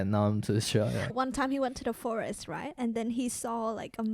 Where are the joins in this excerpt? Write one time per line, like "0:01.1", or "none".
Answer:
0:01.1